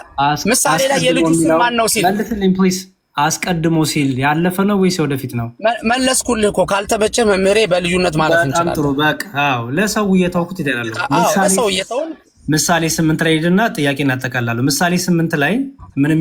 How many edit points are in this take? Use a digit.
0